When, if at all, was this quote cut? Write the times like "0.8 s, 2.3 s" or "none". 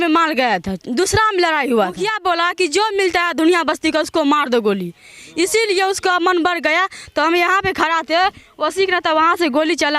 2.1 s